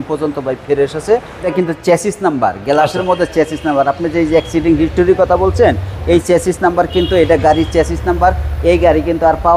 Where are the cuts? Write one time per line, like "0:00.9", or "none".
0:01.5